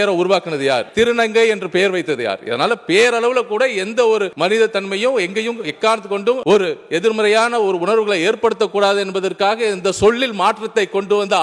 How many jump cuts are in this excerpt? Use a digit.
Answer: 0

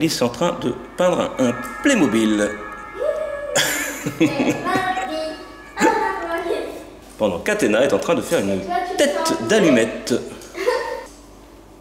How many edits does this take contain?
0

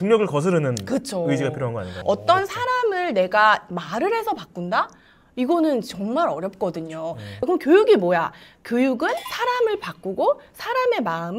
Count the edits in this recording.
2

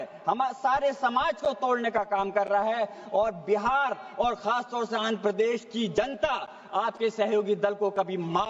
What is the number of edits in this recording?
0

